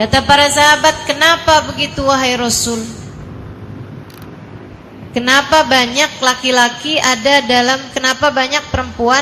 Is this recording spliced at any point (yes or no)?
no